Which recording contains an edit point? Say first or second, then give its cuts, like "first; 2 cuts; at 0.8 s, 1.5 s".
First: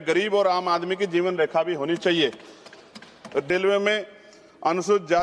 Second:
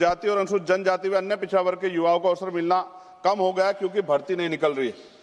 first; 1 cut; at 3.5 s